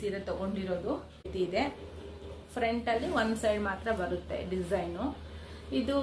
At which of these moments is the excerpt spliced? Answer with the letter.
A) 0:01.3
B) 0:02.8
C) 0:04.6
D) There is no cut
A